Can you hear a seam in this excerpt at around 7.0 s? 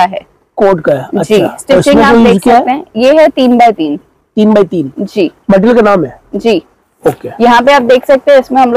no; 0 cuts

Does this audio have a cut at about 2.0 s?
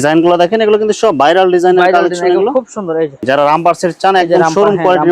no; 1 cut; at 3.2 s

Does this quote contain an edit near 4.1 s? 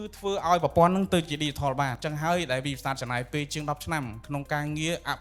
no; 1 cut; at 2.0 s

